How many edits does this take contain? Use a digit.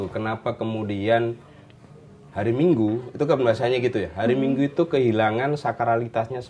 0